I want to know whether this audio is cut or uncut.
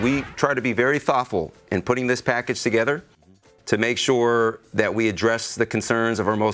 uncut